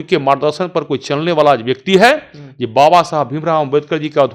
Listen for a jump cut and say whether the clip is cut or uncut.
uncut